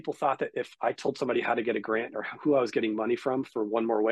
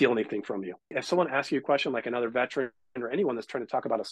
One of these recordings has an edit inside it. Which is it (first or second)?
second